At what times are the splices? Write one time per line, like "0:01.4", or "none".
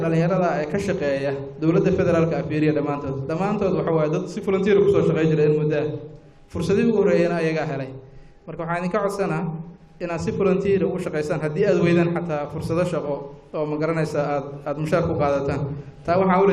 0:04.6